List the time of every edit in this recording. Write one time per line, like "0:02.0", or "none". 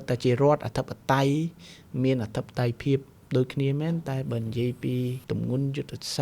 0:05.2